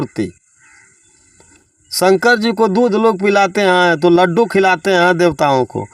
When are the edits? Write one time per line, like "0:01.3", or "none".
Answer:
none